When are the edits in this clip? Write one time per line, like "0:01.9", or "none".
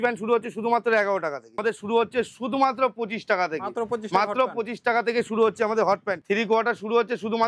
0:01.6
0:06.1